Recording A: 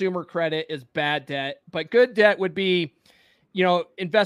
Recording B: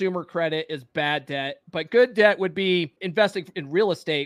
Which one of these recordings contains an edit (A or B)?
B